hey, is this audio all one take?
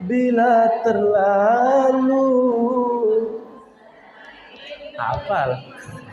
yes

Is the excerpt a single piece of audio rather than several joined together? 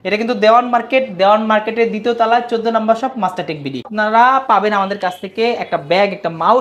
no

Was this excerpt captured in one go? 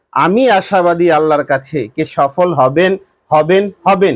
yes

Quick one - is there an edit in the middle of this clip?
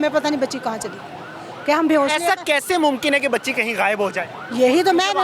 no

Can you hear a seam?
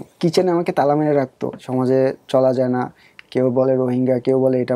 yes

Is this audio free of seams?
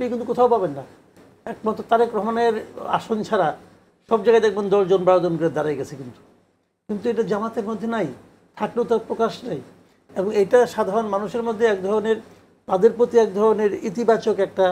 yes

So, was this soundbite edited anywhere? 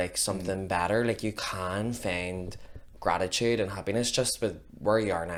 no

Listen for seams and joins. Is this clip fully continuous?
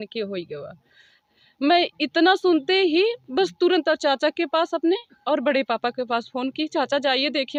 yes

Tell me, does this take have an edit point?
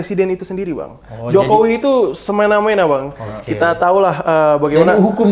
no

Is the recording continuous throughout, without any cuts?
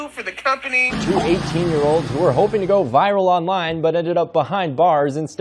no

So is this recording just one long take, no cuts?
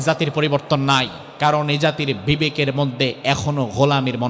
no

